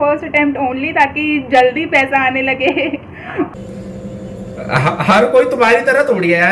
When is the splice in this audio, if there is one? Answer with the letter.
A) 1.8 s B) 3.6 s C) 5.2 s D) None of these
D